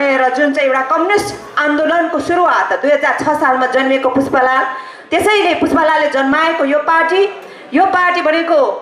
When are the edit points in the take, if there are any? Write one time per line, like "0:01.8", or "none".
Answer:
none